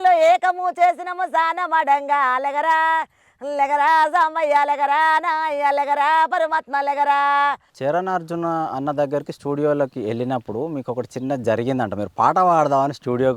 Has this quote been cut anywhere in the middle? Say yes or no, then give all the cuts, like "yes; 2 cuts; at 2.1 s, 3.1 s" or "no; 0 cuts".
yes; 1 cut; at 7.7 s